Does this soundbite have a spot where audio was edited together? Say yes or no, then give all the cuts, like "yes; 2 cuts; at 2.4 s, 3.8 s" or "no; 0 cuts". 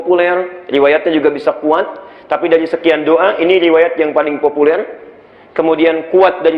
no; 0 cuts